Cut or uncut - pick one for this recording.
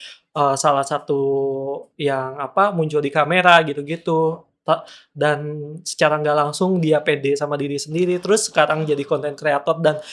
uncut